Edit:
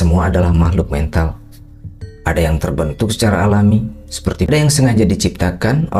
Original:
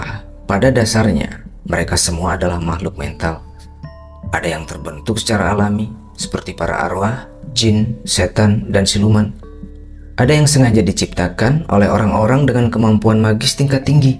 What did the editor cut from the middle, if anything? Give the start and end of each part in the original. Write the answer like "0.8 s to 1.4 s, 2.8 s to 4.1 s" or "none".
6.6 s to 10.3 s